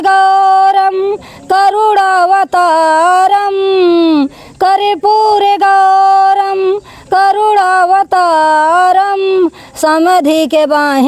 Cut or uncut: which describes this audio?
uncut